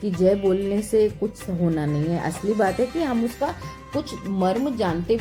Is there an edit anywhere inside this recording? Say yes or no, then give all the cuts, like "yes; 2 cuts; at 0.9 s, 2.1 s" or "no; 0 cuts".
no; 0 cuts